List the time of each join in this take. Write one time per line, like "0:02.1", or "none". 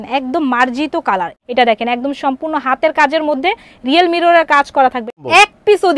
0:01.3
0:05.1